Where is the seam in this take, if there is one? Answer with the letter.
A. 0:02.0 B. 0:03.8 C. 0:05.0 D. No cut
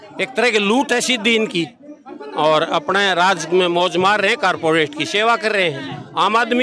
D